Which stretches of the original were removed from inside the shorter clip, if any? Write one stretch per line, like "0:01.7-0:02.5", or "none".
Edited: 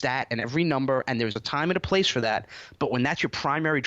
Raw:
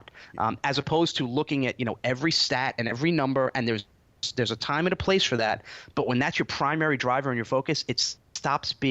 0:03.9-0:04.6